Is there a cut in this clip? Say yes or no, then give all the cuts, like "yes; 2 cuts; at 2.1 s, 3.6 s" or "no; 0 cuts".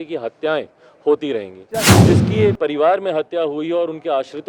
yes; 1 cut; at 1.9 s